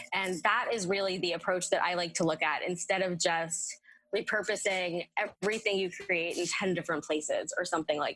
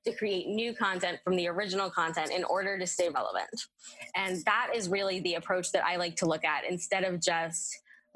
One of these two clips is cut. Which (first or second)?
second